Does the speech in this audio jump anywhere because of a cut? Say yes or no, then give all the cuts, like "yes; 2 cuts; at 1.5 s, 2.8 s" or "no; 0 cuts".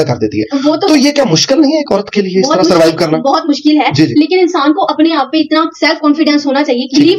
no; 0 cuts